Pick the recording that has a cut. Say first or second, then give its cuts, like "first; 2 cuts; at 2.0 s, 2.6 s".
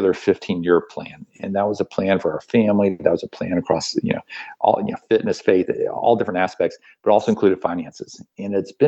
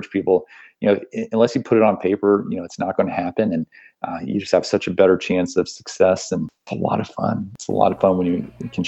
second; 2 cuts; at 6.6 s, 7.5 s